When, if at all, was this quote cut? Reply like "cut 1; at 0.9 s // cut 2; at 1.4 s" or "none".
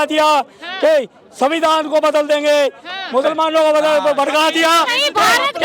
none